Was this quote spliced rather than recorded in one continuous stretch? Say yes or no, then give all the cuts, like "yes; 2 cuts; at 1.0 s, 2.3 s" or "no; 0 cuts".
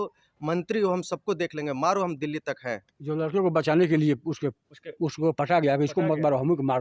yes; 1 cut; at 2.9 s